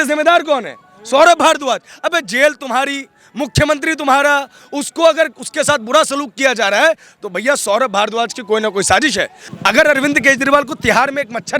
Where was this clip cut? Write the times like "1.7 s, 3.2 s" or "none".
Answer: 9.4 s